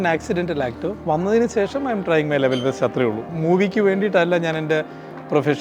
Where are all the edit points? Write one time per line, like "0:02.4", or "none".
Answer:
0:01.0
0:03.3